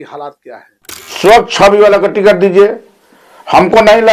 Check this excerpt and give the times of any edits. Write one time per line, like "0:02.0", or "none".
0:01.3